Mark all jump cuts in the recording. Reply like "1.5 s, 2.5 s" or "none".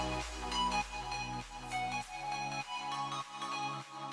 none